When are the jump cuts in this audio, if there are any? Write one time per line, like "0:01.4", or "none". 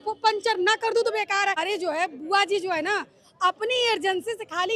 0:01.6